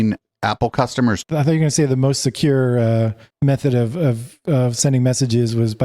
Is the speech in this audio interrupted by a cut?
yes; 1 cut; at 1.2 s

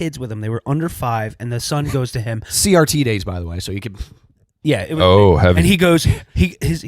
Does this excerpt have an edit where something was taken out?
no; 0 cuts

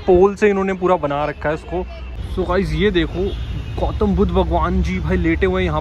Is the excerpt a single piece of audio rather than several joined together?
no; 1 cut; at 2.0 s

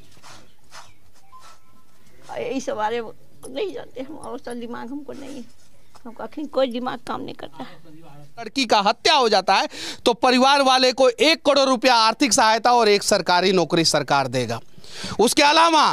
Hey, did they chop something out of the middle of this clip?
yes; 1 cut; at 8.5 s

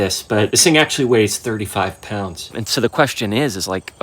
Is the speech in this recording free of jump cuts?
no; 1 cut; at 2.4 s

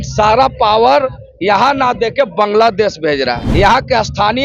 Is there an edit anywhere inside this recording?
yes; 1 cut; at 3.4 s

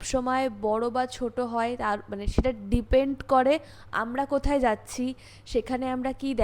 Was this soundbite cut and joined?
no; 0 cuts

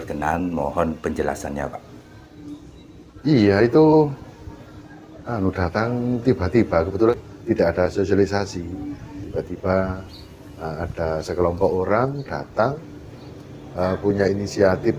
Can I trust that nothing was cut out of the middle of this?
no; 1 cut; at 7.2 s

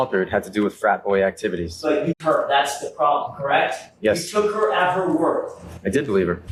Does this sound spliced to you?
no; 0 cuts

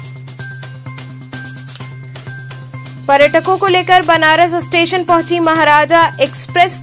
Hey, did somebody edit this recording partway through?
yes; 1 cut; at 1.3 s

